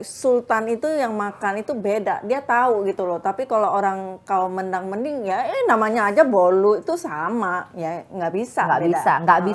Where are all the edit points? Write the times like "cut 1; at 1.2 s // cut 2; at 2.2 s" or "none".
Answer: none